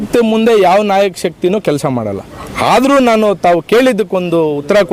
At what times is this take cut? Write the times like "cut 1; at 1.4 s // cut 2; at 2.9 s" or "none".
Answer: none